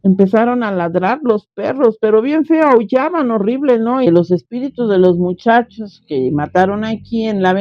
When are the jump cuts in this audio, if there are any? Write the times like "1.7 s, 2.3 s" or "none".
4.1 s